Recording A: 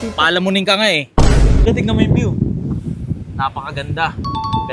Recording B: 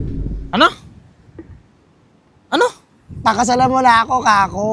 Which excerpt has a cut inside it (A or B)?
A